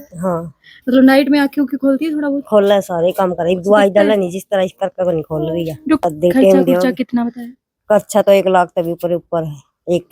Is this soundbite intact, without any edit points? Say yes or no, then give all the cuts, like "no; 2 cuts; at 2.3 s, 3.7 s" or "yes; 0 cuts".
no; 1 cut; at 6.0 s